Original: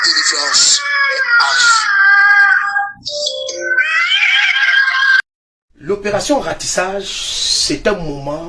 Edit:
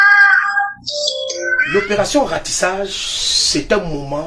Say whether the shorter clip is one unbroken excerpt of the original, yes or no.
no